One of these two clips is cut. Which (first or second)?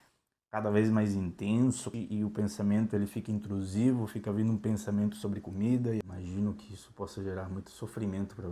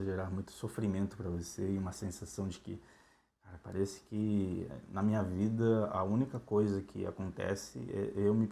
first